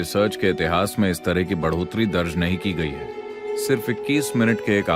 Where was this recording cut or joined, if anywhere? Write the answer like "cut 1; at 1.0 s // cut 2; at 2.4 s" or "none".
cut 1; at 3.0 s